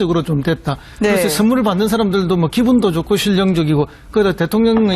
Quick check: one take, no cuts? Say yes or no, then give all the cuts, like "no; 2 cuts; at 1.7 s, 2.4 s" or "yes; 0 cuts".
yes; 0 cuts